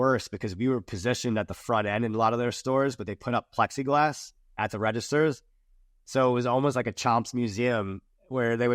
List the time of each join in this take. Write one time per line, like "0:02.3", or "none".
none